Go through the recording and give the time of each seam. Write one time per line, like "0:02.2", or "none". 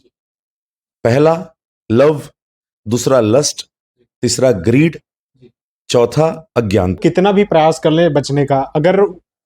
0:07.0